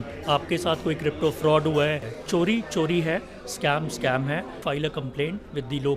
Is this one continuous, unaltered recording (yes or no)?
no